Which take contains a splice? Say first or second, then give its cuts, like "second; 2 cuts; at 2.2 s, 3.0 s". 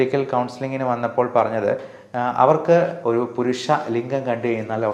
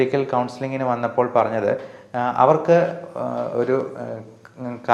first; 1 cut; at 3.0 s